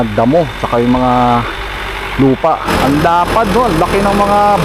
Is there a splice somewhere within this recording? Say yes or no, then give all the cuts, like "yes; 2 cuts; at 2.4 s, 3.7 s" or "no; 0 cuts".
yes; 1 cut; at 2.6 s